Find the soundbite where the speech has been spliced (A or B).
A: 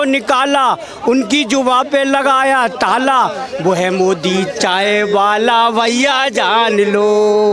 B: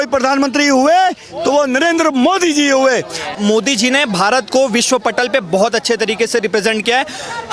B